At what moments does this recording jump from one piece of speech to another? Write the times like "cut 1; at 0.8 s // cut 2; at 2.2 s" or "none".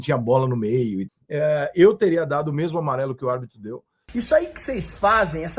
cut 1; at 1.1 s // cut 2; at 4.0 s

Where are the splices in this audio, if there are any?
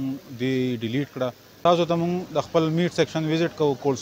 cut 1; at 1.5 s

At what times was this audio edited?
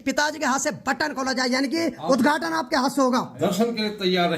cut 1; at 3.3 s

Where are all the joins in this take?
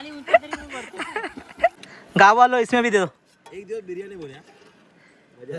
cut 1; at 1.9 s

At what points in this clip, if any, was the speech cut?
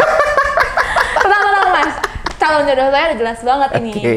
none

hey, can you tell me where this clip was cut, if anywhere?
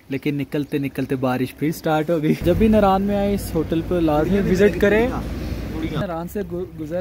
cut 1; at 2.4 s // cut 2; at 6.0 s

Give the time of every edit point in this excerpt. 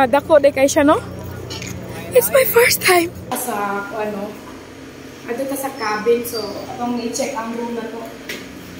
cut 1; at 3.3 s

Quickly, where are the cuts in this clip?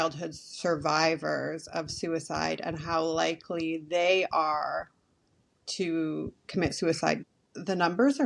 cut 1; at 7.2 s

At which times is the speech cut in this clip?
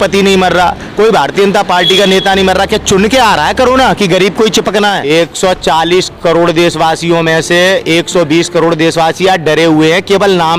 cut 1; at 5.0 s

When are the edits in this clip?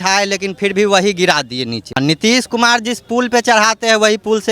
cut 1; at 2.0 s

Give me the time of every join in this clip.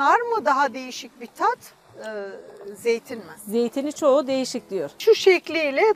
cut 1; at 5.0 s

